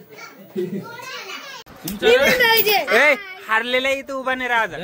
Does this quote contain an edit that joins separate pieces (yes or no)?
yes